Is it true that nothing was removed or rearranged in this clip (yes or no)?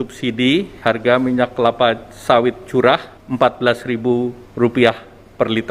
no